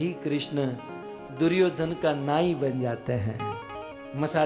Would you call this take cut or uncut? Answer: uncut